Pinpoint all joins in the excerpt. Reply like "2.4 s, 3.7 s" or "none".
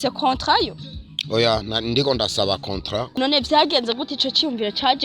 3.2 s